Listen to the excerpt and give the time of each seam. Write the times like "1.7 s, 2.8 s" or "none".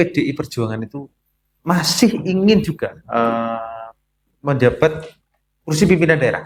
none